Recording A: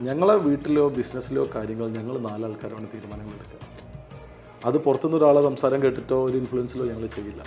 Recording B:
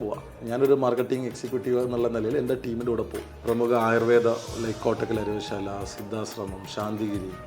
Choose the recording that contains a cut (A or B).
B